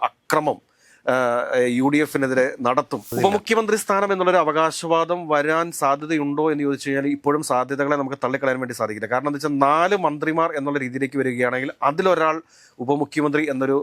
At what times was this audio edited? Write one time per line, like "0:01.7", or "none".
0:03.1